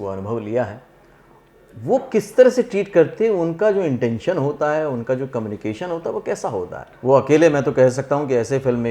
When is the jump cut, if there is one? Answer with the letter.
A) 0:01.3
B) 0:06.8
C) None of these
B